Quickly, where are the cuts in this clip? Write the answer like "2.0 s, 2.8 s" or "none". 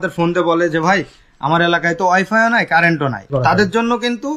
3.3 s